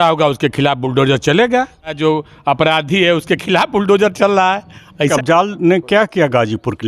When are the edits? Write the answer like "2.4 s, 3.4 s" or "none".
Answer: 1.9 s, 5.1 s